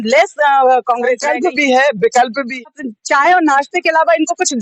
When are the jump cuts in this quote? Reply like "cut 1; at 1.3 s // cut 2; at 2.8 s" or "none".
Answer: cut 1; at 1.2 s // cut 2; at 2.6 s